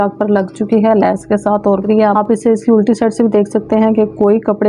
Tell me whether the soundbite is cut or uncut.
cut